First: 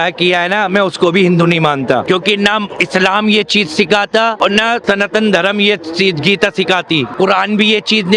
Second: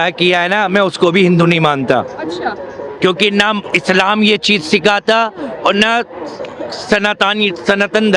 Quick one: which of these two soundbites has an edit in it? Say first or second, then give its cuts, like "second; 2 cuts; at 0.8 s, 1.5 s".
first; 3 cuts; at 2.0 s, 4.7 s, 7.1 s